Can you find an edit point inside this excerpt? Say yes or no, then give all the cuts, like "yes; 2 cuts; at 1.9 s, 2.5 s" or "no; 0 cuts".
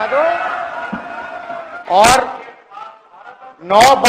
yes; 1 cut; at 1.7 s